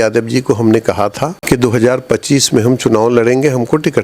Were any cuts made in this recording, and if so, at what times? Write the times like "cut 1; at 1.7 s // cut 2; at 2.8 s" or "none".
cut 1; at 1.4 s